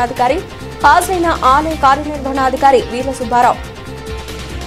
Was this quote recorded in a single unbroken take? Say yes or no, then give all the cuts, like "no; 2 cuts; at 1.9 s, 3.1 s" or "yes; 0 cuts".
no; 1 cut; at 3.6 s